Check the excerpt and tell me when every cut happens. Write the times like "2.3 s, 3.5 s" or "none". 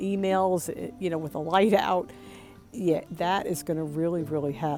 none